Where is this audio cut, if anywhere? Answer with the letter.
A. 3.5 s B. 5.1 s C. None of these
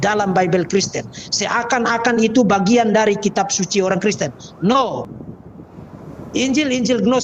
B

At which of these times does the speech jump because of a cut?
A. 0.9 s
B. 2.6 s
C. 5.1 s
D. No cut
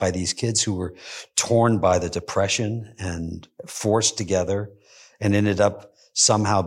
D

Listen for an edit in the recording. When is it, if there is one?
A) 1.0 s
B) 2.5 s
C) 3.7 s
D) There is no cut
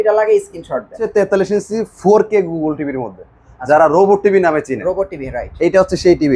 A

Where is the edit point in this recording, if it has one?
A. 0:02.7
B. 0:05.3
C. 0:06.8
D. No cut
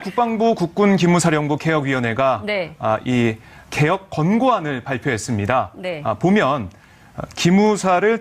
B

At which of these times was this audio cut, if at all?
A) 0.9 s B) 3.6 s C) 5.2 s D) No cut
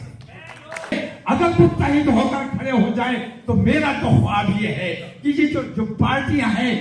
A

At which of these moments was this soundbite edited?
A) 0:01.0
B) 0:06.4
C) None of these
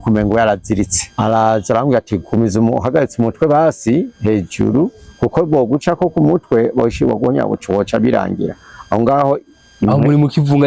A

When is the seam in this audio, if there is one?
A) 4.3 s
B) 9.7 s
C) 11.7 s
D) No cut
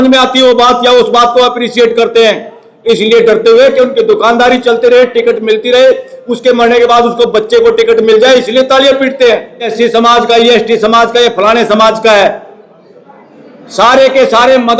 B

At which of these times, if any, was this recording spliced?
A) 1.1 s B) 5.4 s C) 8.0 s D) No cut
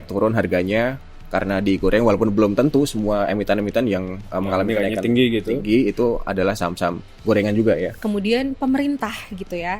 C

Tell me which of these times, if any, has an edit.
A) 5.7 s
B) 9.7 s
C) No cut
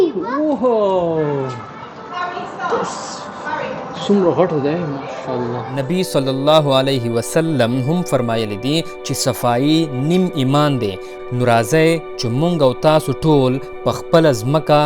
A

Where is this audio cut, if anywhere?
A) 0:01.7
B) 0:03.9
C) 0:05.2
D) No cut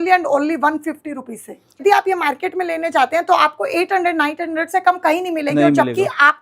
A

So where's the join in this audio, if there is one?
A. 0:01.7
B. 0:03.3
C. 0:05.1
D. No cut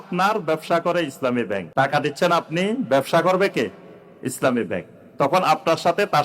A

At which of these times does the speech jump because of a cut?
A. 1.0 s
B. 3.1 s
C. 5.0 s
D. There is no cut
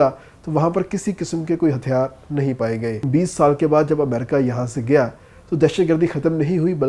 B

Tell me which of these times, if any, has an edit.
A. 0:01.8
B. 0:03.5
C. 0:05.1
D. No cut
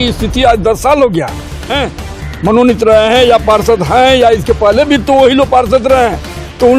A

